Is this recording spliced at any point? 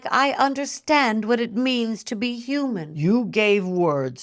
yes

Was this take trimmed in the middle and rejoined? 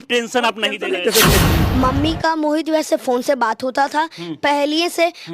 yes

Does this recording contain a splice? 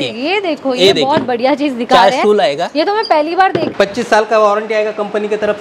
yes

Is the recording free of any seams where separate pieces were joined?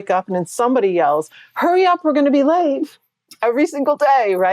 no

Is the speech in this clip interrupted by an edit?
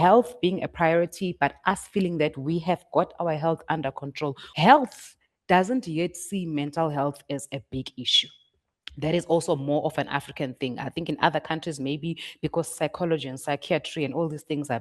yes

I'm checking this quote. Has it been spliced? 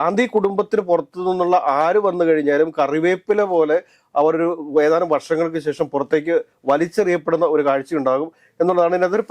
no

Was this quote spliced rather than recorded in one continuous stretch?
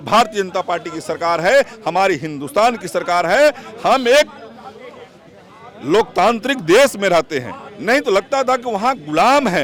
no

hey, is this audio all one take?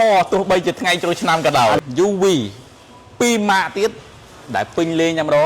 no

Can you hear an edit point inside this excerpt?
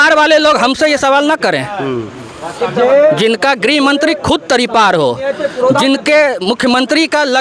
no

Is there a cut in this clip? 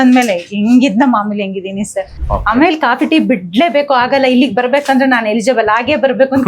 yes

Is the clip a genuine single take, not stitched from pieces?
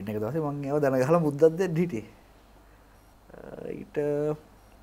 yes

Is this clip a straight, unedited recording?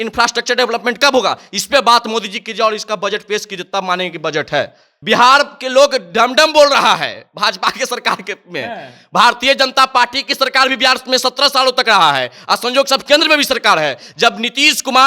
no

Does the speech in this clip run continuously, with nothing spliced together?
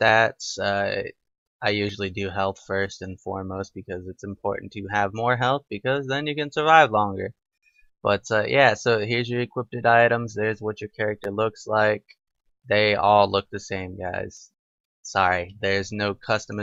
yes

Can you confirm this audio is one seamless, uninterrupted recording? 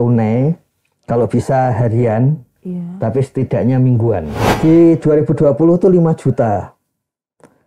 no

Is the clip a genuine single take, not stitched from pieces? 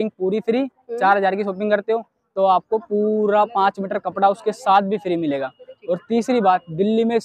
yes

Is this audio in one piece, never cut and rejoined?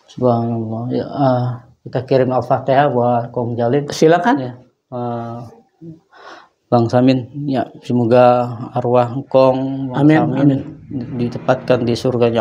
yes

